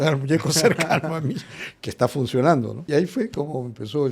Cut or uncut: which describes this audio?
cut